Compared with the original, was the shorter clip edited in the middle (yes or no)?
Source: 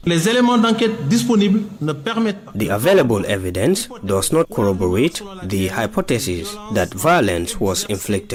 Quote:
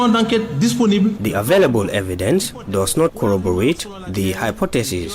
yes